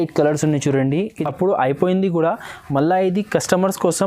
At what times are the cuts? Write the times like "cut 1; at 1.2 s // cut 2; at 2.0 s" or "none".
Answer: cut 1; at 1.2 s

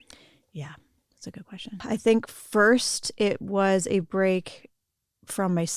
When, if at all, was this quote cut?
cut 1; at 1.8 s

